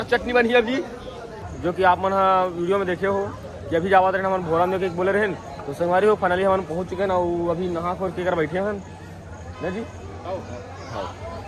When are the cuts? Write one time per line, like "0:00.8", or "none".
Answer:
0:01.5